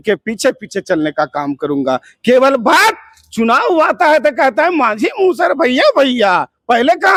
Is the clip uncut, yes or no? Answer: yes